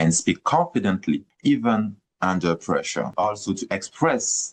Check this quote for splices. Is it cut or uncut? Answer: cut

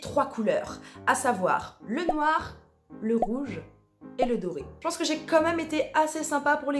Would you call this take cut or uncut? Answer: uncut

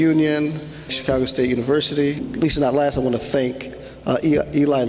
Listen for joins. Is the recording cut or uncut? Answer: cut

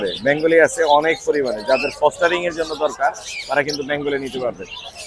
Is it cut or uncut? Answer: uncut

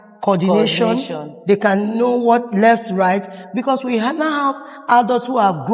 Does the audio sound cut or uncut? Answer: uncut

